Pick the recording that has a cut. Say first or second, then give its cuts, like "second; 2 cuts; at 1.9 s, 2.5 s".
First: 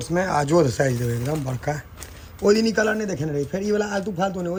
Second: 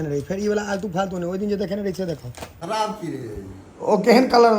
second; 1 cut; at 2.5 s